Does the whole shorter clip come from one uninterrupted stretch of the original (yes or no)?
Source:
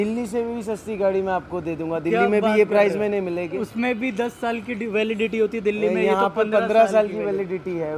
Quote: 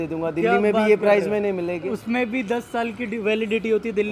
yes